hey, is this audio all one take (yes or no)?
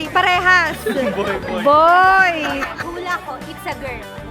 no